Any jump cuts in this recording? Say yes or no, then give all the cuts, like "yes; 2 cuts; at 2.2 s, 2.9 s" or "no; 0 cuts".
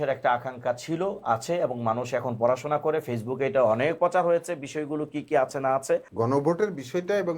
yes; 1 cut; at 6.1 s